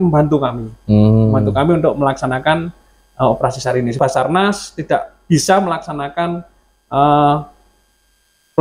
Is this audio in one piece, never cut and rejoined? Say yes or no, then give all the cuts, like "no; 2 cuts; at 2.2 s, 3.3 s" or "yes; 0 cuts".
no; 1 cut; at 4.0 s